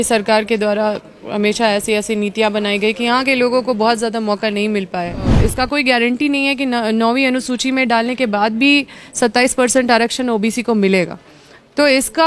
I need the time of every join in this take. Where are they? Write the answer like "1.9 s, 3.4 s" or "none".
5.3 s